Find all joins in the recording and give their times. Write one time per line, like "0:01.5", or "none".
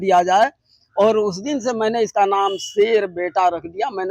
none